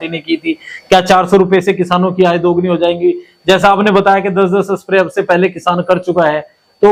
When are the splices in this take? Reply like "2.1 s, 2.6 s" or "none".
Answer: none